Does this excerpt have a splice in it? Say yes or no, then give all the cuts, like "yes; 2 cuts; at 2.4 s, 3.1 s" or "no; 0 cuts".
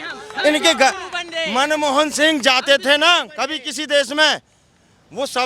no; 0 cuts